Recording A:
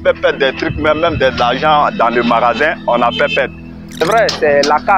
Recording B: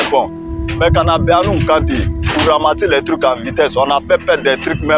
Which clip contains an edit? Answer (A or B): A